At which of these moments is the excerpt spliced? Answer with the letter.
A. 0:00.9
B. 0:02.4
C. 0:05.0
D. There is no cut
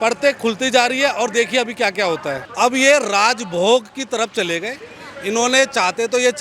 B